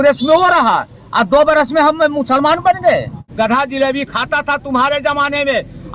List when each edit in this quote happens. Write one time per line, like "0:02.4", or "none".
0:03.2

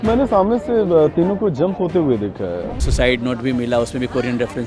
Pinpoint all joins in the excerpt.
0:02.9

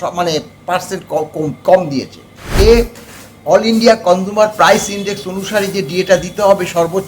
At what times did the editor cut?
0:02.4

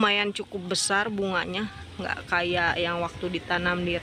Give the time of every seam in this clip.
none

